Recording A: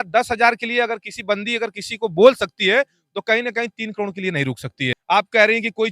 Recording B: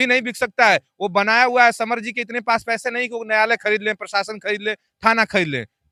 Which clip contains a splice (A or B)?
A